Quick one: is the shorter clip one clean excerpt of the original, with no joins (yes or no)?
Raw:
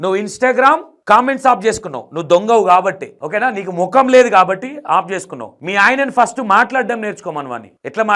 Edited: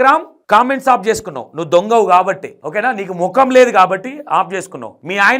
yes